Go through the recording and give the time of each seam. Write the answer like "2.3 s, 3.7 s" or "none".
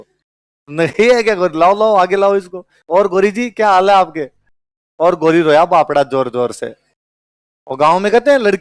none

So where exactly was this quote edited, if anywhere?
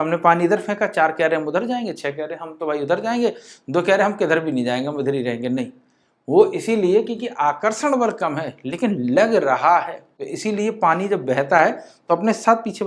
10.2 s

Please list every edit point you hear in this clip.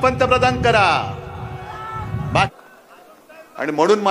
2.5 s

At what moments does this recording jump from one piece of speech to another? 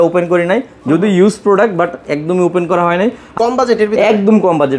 3.4 s

